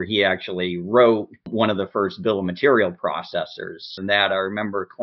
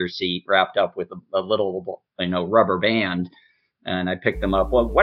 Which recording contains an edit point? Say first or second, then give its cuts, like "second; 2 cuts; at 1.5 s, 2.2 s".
first; 2 cuts; at 1.5 s, 4.0 s